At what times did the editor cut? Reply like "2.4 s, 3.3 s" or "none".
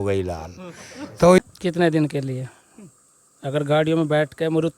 1.4 s